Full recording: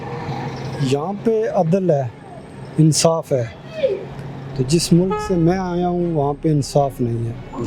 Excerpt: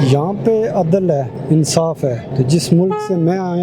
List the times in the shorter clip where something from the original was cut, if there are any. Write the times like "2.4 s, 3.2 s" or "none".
1.3 s, 2.2 s